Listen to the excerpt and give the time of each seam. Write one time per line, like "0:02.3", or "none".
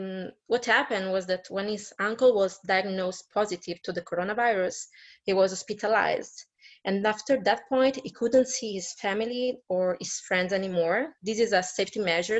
none